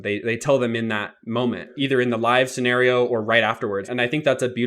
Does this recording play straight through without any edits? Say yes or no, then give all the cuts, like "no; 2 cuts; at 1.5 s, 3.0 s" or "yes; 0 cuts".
no; 2 cuts; at 1.7 s, 3.9 s